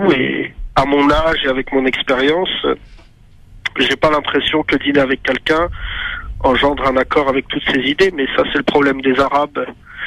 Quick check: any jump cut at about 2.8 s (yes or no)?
yes